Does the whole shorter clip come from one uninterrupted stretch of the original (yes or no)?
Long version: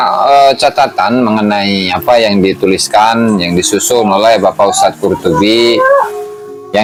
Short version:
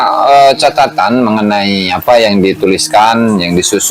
yes